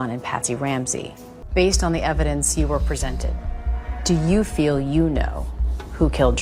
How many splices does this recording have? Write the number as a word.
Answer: one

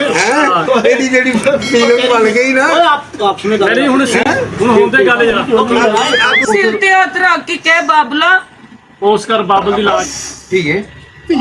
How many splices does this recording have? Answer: two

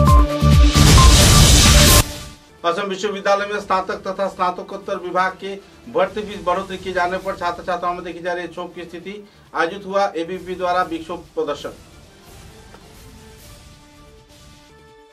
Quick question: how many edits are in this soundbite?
one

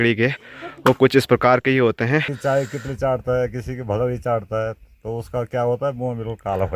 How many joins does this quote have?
one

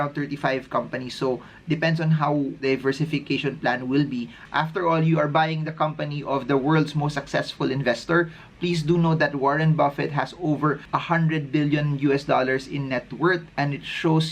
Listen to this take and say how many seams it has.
one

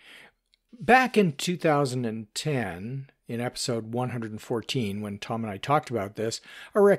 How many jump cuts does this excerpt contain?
zero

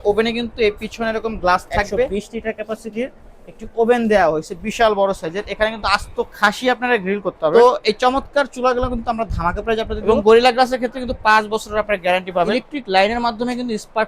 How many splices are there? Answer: four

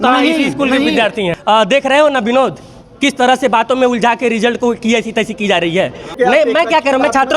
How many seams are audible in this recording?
two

